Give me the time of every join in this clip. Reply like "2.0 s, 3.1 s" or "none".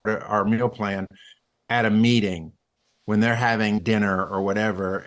3.8 s